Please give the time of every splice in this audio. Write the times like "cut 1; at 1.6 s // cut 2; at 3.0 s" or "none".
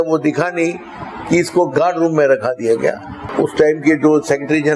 cut 1; at 3.2 s